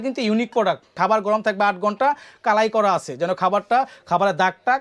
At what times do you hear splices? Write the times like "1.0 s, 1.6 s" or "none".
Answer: 0.9 s